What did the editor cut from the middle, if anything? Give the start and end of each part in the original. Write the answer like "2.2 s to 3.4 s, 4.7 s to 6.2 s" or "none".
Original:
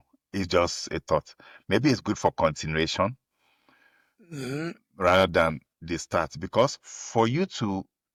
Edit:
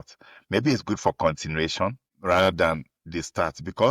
3.3 s to 4.8 s